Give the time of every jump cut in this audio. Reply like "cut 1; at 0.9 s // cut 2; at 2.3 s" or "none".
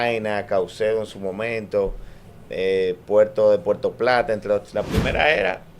cut 1; at 4.7 s